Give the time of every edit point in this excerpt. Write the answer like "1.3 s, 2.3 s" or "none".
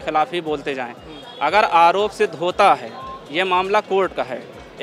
none

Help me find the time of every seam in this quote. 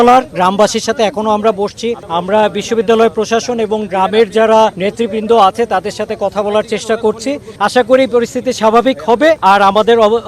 2.0 s, 4.8 s, 7.5 s, 9.4 s

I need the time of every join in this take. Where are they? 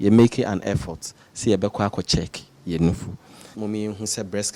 3.4 s

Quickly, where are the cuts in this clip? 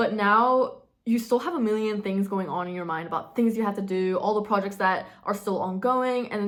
none

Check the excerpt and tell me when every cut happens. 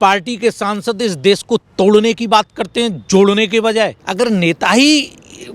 4.0 s

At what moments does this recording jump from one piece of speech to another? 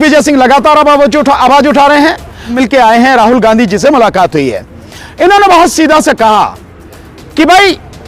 2.5 s

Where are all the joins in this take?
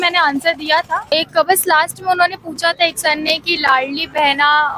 1.1 s

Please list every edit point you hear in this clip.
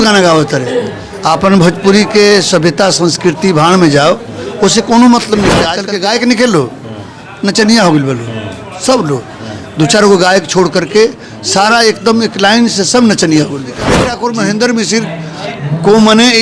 5.8 s, 14.1 s

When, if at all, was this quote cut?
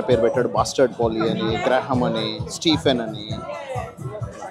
none

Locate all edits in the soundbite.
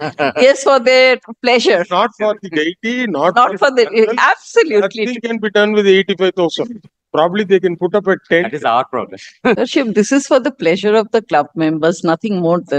9.6 s

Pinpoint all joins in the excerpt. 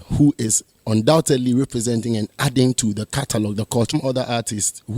3.9 s

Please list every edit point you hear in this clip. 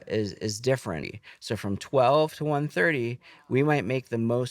1.1 s

